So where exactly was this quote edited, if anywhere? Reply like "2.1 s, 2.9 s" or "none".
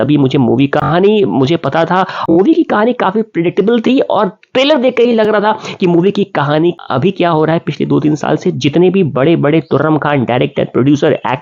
2.3 s, 6.8 s